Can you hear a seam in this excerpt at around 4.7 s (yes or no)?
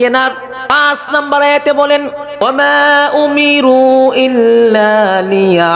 no